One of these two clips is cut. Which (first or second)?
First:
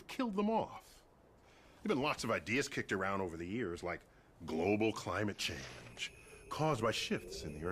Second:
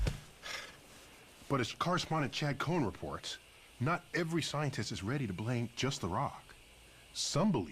second